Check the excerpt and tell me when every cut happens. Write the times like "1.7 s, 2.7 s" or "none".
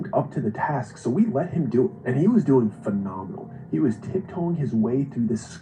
2.3 s

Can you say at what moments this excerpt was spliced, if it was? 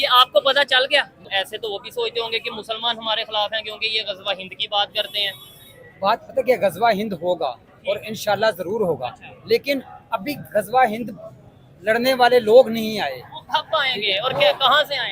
1.2 s

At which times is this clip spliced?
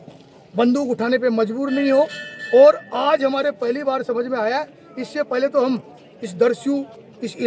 none

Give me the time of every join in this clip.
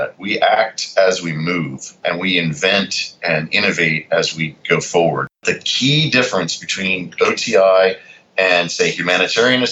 1.8 s, 5.4 s

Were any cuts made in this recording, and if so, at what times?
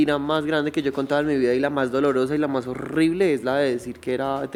none

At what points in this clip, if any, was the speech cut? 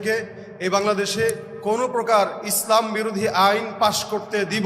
1.5 s

